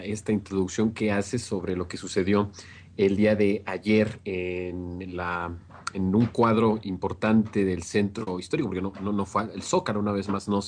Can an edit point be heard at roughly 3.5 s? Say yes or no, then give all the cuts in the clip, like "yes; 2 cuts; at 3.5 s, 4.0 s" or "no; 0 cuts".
yes; 1 cut; at 3.5 s